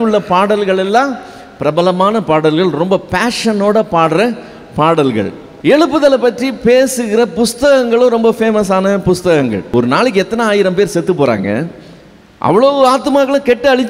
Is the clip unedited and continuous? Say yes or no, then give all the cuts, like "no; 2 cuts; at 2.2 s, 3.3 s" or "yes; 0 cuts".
no; 2 cuts; at 5.4 s, 9.7 s